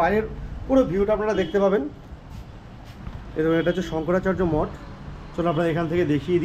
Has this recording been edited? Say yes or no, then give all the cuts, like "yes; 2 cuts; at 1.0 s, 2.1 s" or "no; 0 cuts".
no; 0 cuts